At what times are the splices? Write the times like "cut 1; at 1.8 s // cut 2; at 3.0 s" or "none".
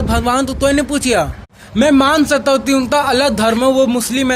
cut 1; at 1.5 s